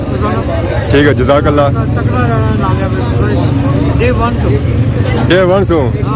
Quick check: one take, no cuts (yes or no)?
yes